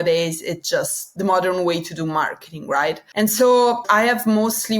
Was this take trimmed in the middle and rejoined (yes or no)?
yes